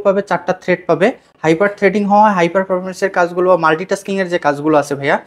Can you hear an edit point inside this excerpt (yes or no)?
no